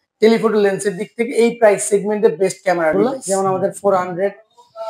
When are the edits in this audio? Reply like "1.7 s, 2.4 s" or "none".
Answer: 2.9 s